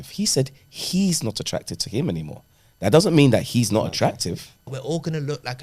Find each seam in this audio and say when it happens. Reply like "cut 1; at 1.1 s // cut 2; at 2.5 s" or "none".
cut 1; at 4.7 s